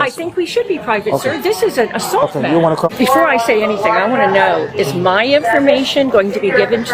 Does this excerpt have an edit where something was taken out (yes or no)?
yes